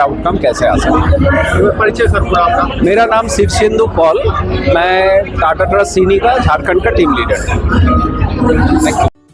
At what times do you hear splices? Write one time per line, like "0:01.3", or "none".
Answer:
none